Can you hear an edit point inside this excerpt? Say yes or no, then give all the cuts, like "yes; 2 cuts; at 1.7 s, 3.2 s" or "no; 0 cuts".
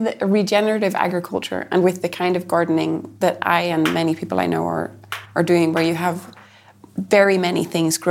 no; 0 cuts